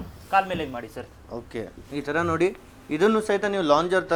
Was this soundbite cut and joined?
no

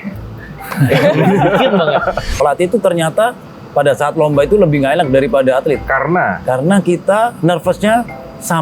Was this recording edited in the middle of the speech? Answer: yes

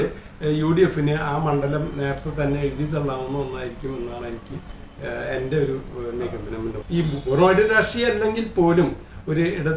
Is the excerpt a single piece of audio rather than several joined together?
no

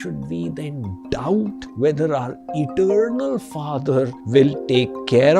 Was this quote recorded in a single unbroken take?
no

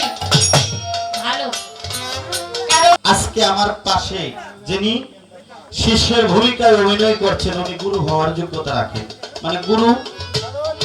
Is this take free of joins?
no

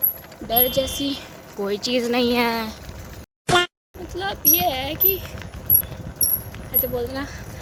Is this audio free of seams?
yes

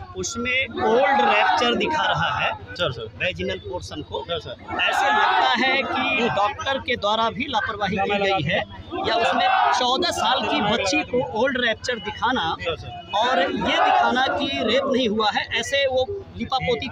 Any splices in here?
no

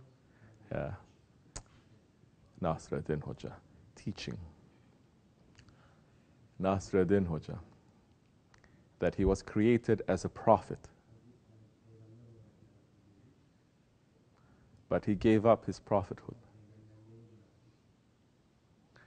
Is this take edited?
no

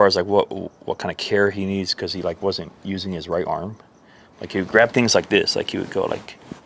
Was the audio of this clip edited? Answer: no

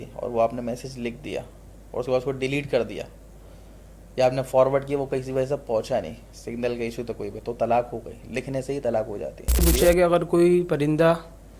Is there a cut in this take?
yes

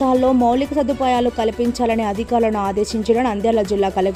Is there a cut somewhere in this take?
no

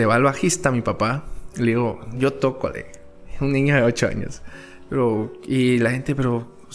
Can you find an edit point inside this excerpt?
no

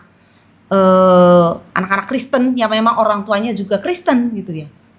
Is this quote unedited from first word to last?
yes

